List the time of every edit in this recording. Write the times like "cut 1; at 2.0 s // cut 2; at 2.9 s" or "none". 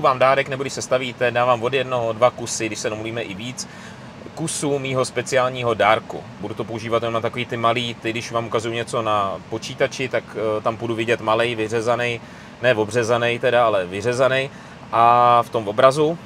cut 1; at 6.4 s